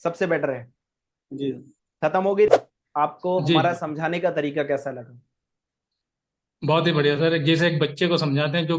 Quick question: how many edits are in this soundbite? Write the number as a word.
one